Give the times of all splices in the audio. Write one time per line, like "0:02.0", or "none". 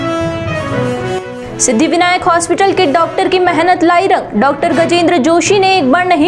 0:01.1